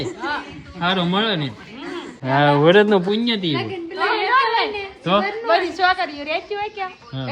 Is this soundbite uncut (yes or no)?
no